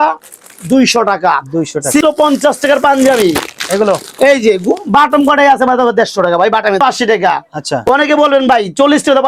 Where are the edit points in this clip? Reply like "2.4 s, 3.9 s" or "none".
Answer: 2.0 s, 6.8 s